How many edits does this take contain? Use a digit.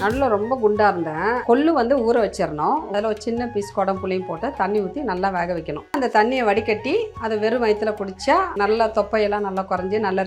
3